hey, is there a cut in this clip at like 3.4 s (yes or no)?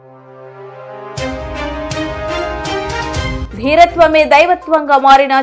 yes